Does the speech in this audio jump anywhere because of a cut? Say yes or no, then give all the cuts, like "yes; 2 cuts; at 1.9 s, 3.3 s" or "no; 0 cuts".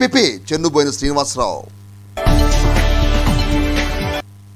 no; 0 cuts